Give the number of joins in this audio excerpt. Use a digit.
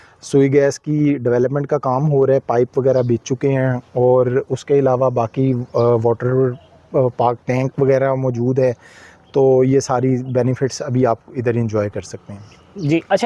0